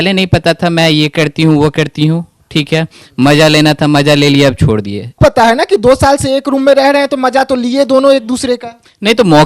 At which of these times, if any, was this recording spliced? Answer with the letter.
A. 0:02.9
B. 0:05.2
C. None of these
B